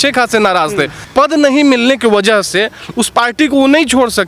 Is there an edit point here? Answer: yes; 1 cut; at 1.0 s

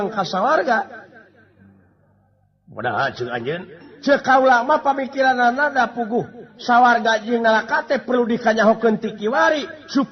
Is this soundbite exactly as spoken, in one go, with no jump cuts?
yes; 0 cuts

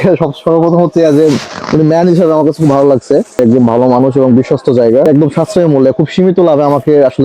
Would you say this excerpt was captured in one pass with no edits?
no; 2 cuts; at 3.4 s, 5.1 s

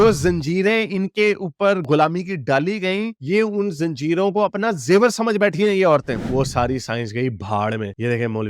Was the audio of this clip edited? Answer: yes; 1 cut; at 6.1 s

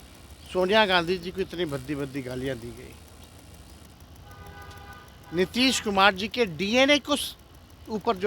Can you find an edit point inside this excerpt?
no; 0 cuts

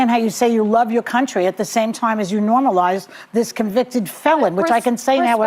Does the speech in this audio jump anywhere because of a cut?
no; 0 cuts

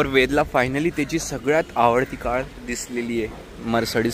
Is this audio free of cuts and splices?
yes; 0 cuts

